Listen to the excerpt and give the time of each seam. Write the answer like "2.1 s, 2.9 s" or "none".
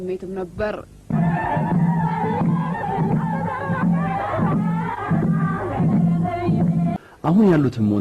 7.0 s